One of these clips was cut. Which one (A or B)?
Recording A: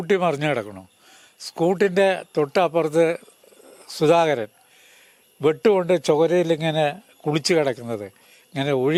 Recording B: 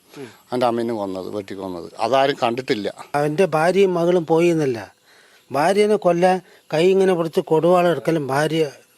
B